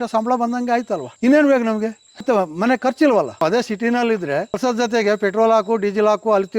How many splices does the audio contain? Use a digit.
4